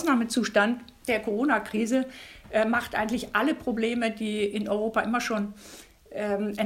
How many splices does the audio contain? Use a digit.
1